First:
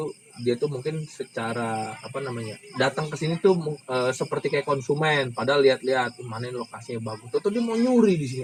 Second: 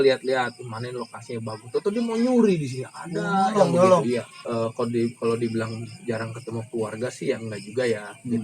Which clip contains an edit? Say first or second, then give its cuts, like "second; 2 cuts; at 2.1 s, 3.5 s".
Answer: second; 1 cut; at 4.4 s